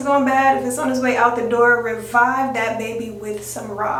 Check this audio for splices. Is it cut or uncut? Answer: uncut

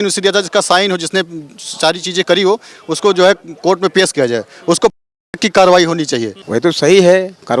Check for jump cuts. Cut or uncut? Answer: cut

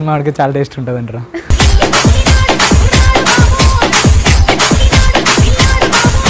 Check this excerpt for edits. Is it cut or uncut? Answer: cut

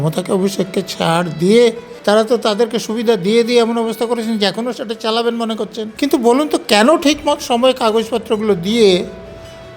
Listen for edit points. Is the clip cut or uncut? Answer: cut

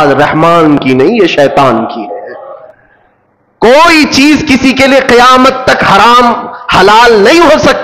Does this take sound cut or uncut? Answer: uncut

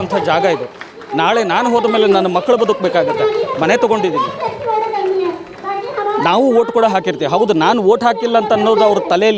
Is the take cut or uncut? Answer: uncut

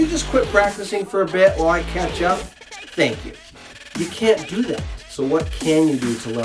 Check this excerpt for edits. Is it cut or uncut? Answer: cut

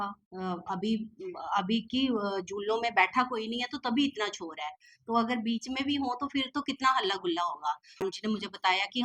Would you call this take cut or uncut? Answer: cut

